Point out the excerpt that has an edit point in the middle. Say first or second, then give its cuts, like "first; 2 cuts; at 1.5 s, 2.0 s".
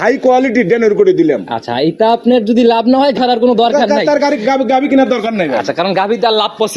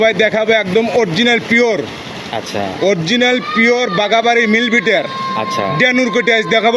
first; 1 cut; at 3.2 s